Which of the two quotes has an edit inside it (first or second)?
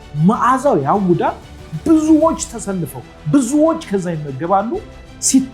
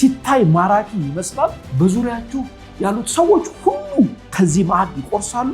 second